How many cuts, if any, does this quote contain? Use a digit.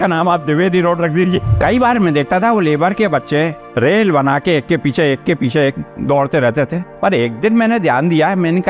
1